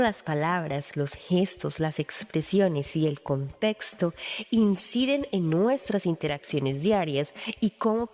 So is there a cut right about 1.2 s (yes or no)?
no